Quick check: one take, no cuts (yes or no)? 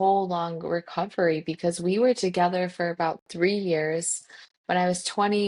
yes